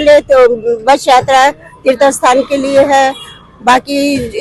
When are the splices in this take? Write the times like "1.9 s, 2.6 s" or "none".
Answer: none